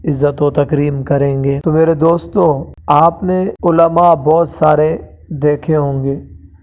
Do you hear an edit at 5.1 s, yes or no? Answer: no